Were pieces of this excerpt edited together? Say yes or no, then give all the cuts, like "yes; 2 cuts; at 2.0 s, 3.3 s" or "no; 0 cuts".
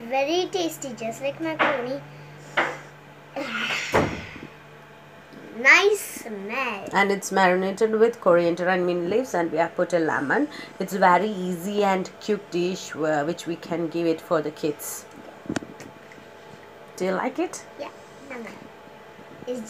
no; 0 cuts